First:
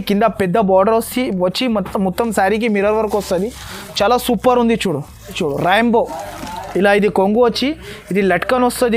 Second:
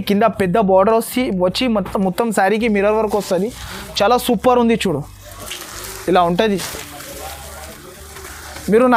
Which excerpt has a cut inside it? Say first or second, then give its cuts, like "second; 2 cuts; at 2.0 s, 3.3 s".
first; 1 cut; at 5.4 s